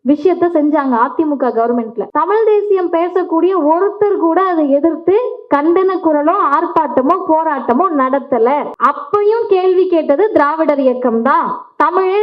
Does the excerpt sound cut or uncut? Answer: cut